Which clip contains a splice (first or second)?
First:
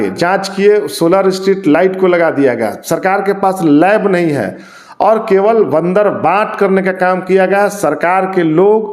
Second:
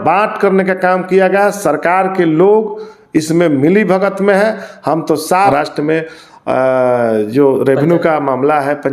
second